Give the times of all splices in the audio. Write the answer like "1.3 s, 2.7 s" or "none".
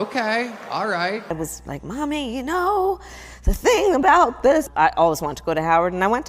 1.2 s